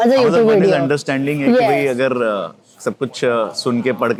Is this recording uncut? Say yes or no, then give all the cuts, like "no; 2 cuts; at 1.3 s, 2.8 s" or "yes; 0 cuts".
yes; 0 cuts